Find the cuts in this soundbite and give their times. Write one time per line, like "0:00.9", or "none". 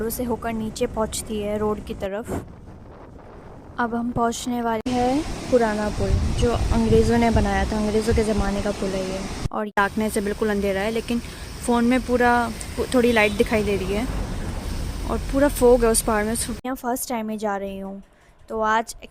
0:04.9
0:09.7
0:16.5